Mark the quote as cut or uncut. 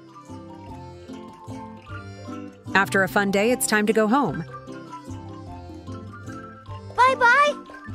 uncut